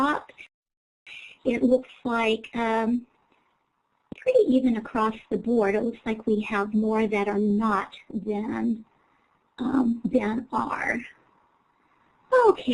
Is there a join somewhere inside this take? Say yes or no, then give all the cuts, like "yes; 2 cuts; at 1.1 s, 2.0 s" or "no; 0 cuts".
no; 0 cuts